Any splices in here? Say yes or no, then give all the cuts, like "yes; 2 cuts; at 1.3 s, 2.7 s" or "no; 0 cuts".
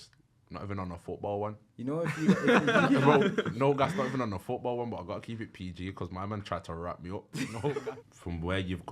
yes; 1 cut; at 7.9 s